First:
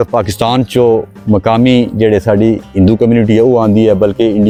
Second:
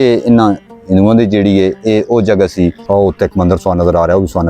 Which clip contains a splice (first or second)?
second